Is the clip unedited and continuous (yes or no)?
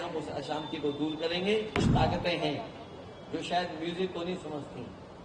no